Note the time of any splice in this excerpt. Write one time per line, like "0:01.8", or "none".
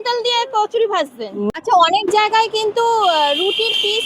0:01.5